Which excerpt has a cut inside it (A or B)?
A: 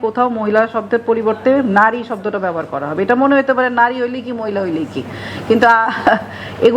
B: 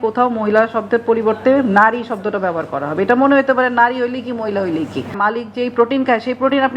B